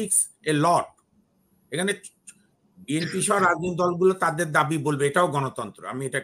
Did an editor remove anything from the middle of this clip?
no; 0 cuts

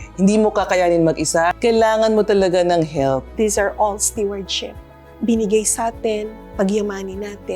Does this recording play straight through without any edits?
no; 2 cuts; at 1.5 s, 3.3 s

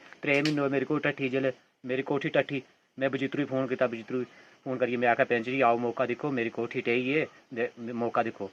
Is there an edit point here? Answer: no; 0 cuts

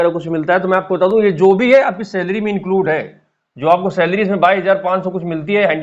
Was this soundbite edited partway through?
no; 0 cuts

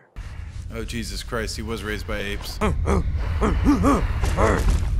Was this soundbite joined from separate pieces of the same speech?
yes; 1 cut; at 2.5 s

